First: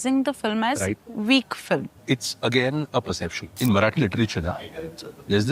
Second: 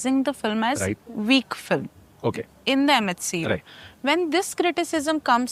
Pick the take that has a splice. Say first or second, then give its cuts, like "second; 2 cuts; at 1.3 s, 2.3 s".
first; 2 cuts; at 2.0 s, 3.4 s